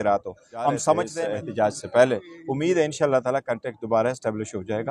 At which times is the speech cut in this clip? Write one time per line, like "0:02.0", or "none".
0:01.1